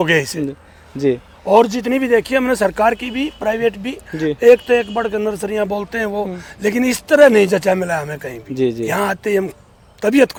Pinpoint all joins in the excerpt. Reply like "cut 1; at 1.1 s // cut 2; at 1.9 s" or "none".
none